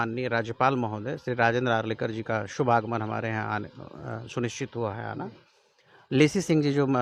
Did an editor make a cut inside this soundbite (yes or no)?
no